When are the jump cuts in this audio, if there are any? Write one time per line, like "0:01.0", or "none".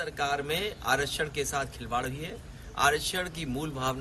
none